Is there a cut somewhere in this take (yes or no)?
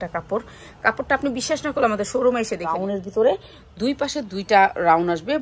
yes